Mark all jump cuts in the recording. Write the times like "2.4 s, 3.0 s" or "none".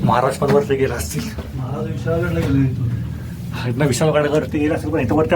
none